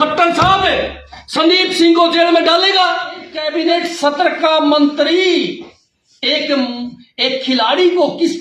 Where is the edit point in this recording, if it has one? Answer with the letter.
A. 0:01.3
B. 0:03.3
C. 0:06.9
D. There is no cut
B